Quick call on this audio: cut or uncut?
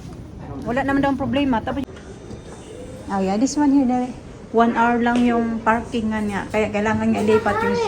cut